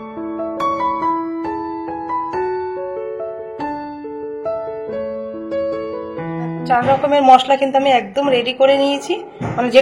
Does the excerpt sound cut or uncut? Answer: uncut